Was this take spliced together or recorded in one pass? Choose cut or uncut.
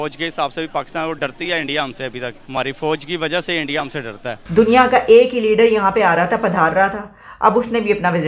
cut